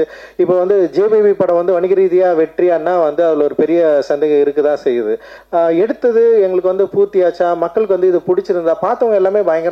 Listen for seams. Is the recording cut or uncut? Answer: cut